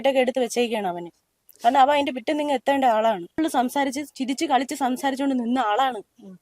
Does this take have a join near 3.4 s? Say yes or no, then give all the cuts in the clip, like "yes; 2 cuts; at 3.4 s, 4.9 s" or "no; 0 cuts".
yes; 1 cut; at 3.4 s